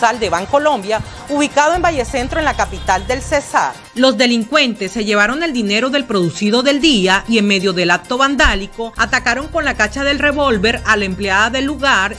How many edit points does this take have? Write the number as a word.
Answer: one